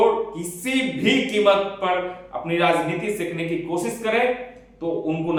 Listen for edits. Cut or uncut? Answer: uncut